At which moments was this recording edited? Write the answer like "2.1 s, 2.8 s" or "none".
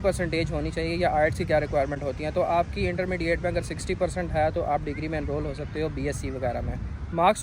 none